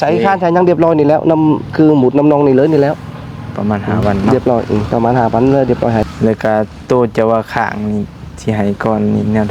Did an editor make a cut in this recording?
yes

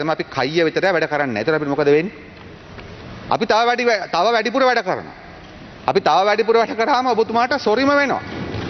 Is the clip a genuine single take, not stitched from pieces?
yes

